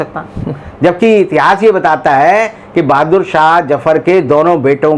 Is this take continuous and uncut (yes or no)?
yes